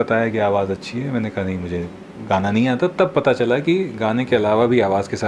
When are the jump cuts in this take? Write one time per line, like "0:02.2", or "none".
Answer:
none